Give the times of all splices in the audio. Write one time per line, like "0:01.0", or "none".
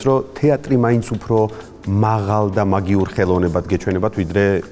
none